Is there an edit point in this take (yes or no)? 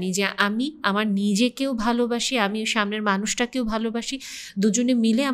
no